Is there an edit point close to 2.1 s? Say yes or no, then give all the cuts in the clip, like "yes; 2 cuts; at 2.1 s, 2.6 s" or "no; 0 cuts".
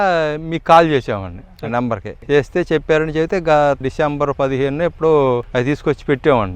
yes; 3 cuts; at 2.1 s, 3.8 s, 5.5 s